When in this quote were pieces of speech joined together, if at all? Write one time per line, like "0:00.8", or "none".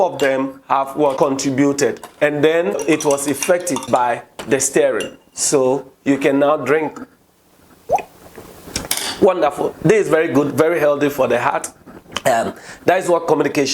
0:01.1
0:02.8
0:03.8